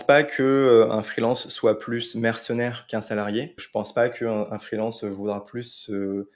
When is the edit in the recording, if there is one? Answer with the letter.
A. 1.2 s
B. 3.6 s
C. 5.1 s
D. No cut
B